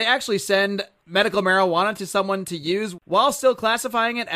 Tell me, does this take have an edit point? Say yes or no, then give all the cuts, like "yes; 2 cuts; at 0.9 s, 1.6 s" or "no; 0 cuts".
yes; 1 cut; at 2.9 s